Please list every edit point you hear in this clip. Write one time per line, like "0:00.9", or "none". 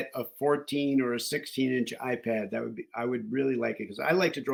none